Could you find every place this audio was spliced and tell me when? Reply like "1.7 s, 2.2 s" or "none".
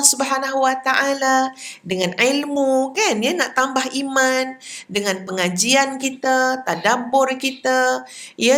none

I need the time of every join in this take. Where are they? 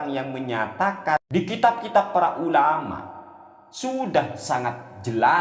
1.2 s

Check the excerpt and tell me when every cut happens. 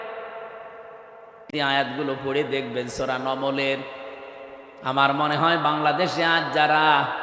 1.5 s

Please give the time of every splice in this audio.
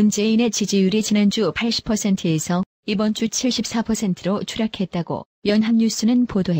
4.4 s

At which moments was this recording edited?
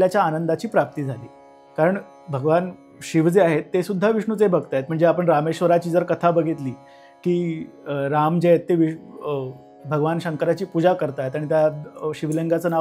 none

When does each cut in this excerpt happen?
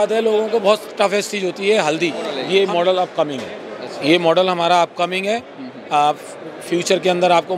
2.3 s

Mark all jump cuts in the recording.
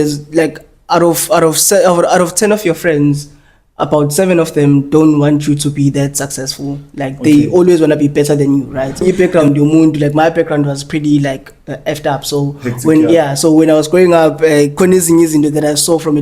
9.0 s

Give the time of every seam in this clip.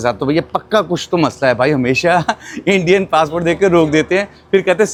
none

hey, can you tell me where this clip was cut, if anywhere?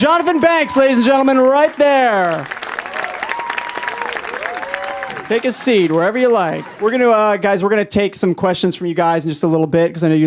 none

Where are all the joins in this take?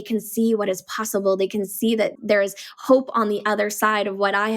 2.2 s

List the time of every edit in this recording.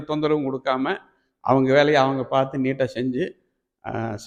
none

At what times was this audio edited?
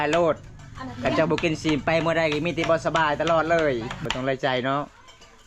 4.0 s

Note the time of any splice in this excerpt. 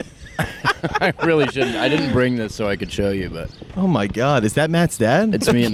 none

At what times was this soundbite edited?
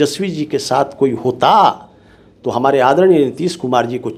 none

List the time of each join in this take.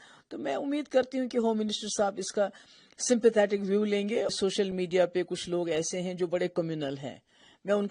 4.3 s

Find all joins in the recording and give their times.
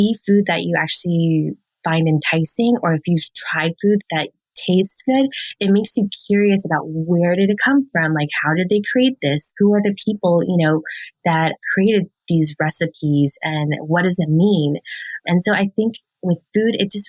none

